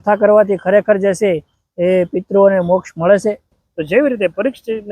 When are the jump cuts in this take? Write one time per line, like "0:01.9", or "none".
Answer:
0:03.6